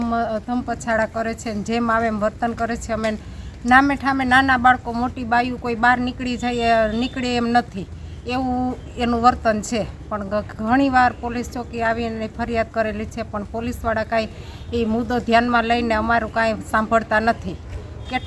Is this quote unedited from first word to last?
yes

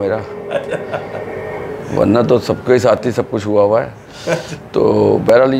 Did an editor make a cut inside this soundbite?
no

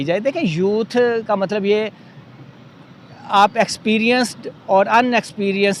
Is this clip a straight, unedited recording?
yes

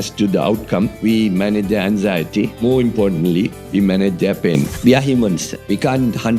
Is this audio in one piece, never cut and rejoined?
no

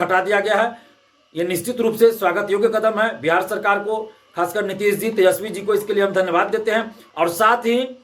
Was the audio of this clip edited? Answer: yes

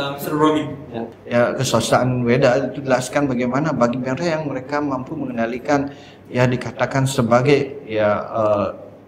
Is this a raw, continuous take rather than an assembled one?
no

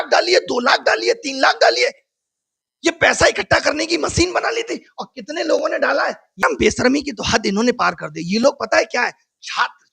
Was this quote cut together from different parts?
yes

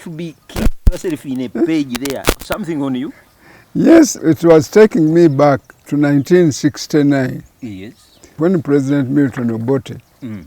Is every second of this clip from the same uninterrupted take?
no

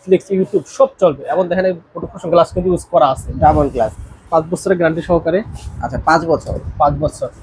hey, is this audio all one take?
no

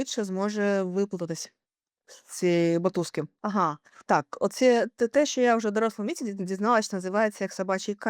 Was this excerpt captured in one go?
yes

